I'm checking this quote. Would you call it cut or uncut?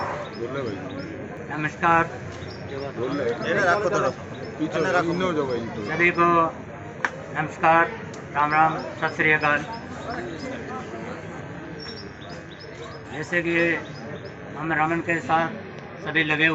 cut